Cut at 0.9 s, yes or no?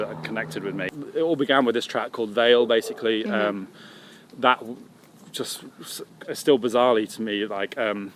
yes